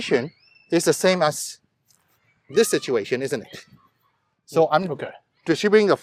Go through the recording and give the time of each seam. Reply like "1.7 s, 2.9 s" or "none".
none